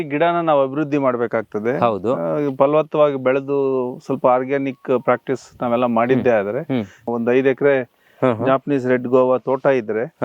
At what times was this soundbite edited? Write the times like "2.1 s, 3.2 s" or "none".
7.1 s